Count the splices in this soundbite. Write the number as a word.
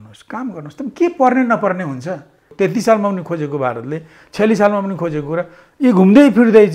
one